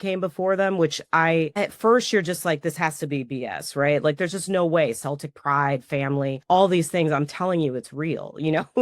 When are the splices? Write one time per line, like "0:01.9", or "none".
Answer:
0:01.5
0:06.4